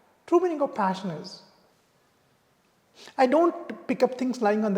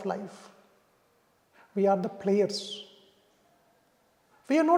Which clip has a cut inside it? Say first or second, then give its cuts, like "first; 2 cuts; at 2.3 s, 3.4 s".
first; 1 cut; at 1.8 s